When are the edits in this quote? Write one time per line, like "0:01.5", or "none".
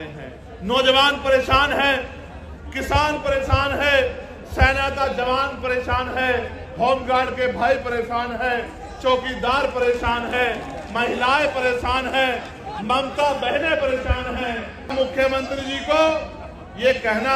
0:14.9

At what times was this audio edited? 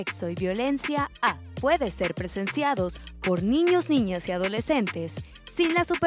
0:01.5

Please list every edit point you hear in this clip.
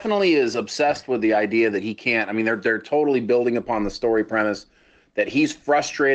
none

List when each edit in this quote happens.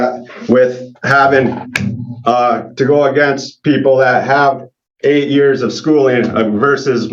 none

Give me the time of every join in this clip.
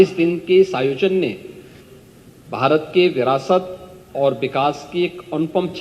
none

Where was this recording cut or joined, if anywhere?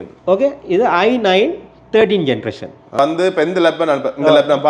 0:03.0

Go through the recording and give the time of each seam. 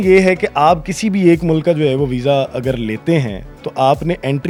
none

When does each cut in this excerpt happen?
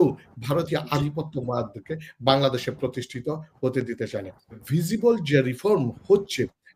0:04.6

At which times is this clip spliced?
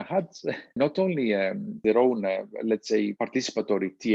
0:00.7
0:01.8
0:03.1

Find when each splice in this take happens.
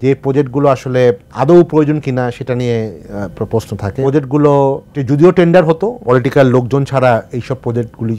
0:01.3
0:04.0
0:04.9
0:06.0

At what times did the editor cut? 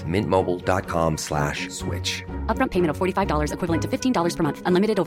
none

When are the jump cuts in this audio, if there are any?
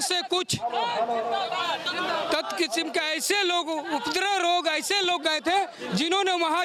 none

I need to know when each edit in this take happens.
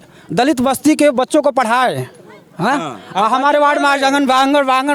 none

